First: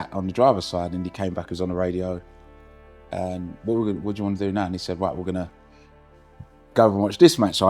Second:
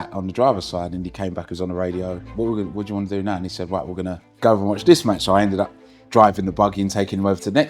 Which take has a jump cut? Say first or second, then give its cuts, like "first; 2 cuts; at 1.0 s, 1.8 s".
second; 2 cuts; at 2.2 s, 4.3 s